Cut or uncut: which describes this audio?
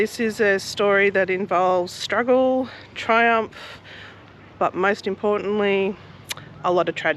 uncut